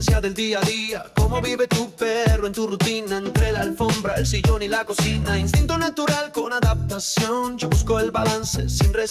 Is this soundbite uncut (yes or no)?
yes